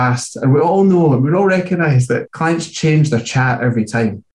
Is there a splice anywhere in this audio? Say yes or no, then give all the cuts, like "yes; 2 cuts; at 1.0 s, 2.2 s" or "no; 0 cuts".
yes; 1 cut; at 2.3 s